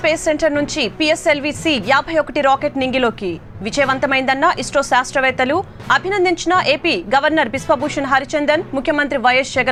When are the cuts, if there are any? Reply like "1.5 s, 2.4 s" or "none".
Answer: none